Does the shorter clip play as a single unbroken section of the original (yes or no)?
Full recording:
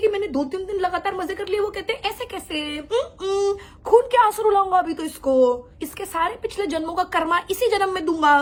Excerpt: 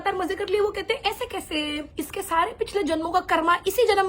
no